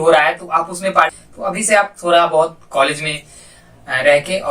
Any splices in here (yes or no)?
yes